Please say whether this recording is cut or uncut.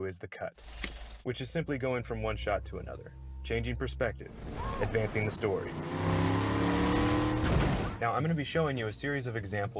uncut